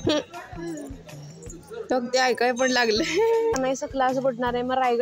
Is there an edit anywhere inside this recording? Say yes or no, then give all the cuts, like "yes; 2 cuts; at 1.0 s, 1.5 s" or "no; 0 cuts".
yes; 1 cut; at 3.5 s